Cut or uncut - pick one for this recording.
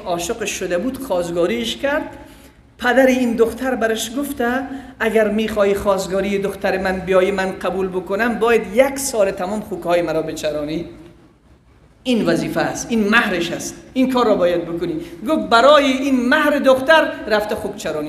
uncut